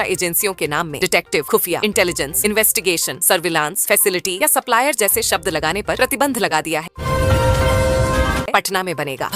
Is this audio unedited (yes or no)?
no